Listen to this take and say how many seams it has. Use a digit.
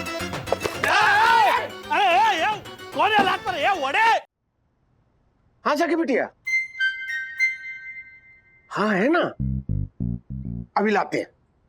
1